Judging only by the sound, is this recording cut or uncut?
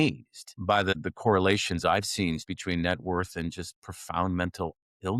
cut